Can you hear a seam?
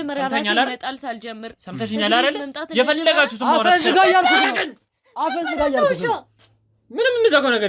no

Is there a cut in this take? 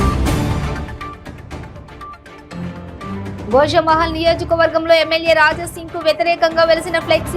yes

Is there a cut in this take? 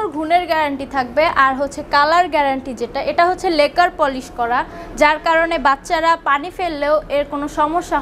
no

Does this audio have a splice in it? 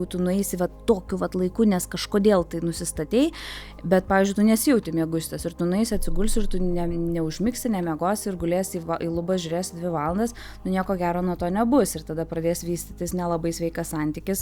no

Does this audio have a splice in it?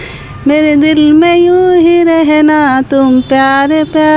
no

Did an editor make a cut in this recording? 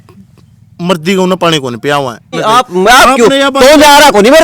yes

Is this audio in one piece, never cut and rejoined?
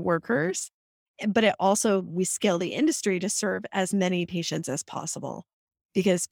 yes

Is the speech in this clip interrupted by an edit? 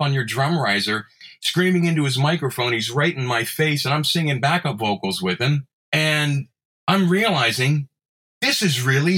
yes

